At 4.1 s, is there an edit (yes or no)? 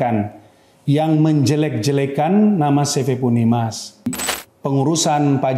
yes